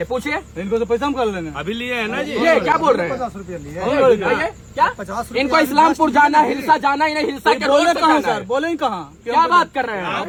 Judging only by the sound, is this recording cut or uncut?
uncut